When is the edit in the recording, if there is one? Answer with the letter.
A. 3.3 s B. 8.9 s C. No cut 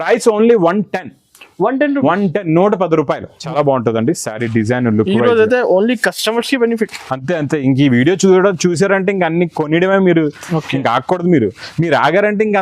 A